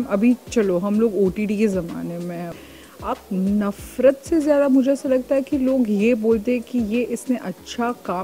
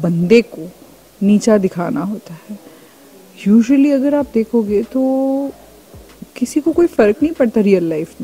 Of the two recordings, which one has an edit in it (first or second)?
first